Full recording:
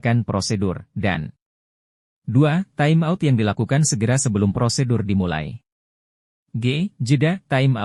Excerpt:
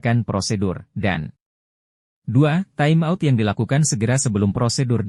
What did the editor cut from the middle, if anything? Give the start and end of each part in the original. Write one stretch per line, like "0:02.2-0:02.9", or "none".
none

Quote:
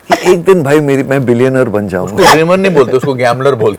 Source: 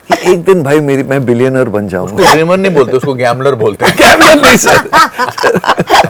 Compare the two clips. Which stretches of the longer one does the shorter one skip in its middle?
none

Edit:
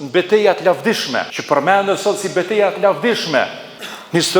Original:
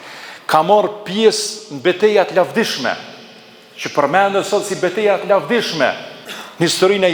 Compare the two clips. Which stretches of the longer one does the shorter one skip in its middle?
0:03.0-0:03.8

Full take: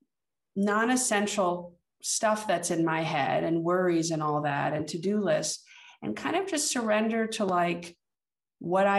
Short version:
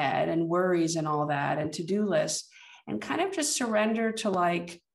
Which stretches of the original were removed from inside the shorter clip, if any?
none

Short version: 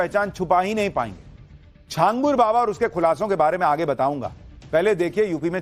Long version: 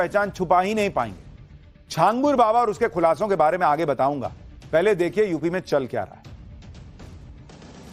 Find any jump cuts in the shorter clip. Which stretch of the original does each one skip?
none

